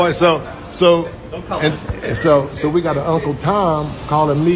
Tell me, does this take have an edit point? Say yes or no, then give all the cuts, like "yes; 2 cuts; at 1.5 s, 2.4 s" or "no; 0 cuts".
no; 0 cuts